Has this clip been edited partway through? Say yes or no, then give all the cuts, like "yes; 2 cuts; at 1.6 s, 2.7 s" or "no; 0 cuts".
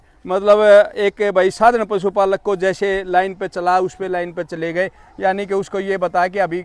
no; 0 cuts